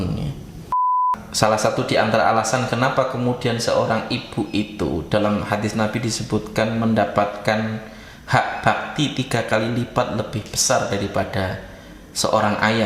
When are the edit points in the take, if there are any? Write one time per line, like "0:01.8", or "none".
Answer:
0:01.0

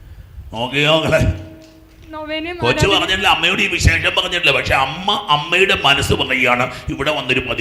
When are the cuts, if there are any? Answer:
none

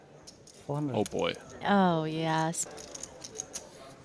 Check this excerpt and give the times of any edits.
0:02.6

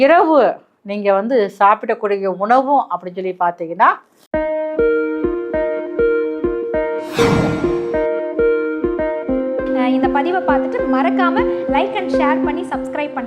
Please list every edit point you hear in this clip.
0:04.2

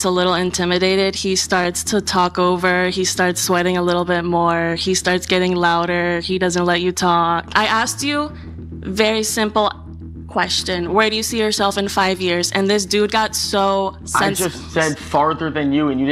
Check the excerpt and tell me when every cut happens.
none

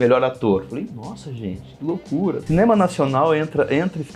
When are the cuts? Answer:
0:02.4

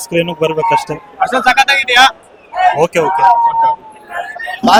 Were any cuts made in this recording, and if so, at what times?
none

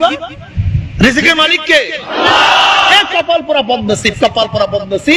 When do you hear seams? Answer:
none

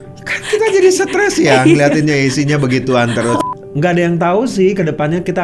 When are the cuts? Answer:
0:03.4

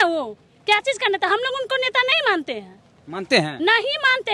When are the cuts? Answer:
none

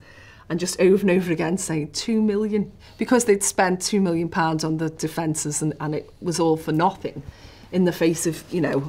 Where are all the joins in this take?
0:02.8

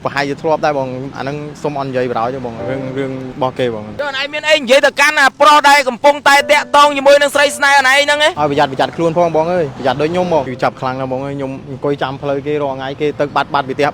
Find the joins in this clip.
0:03.9
0:10.5

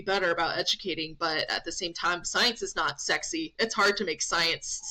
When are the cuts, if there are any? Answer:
none

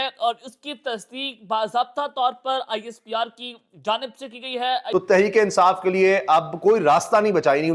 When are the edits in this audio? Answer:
0:04.9

